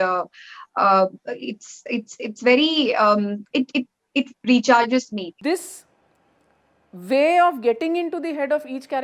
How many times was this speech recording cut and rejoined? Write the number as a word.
one